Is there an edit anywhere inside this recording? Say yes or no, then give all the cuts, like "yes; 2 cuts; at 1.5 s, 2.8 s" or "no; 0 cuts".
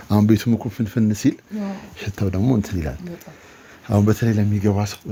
no; 0 cuts